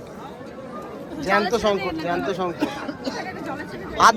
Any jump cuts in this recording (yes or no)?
no